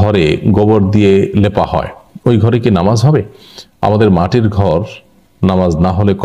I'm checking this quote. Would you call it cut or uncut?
uncut